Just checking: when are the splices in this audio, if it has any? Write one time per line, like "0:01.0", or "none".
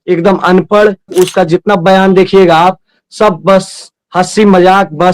0:01.1